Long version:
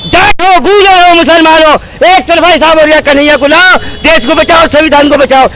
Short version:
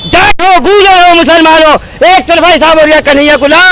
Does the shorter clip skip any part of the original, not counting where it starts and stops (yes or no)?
no